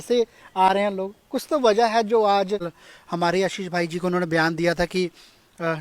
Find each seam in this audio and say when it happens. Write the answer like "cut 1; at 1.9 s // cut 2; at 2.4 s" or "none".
cut 1; at 2.8 s